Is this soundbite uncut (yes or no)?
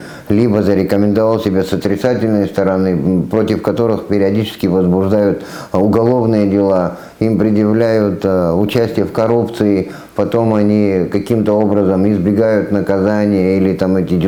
yes